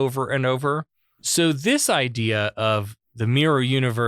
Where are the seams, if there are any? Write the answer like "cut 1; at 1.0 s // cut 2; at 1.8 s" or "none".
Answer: cut 1; at 1.2 s